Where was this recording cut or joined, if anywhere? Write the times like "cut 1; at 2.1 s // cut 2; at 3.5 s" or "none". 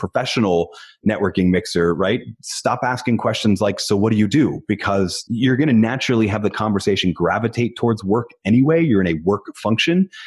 cut 1; at 5.2 s